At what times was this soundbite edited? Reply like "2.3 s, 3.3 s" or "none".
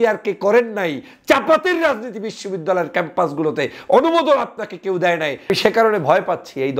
5.5 s